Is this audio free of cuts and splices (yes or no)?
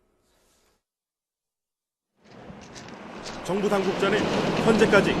no